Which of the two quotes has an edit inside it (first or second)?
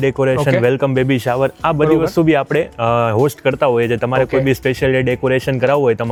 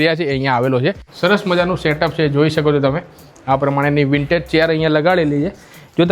second